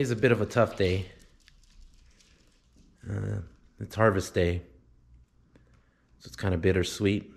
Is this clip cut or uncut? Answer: uncut